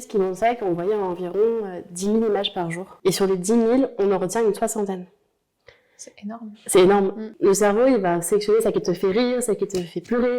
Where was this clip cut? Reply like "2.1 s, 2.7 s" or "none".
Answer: 2.8 s, 7.2 s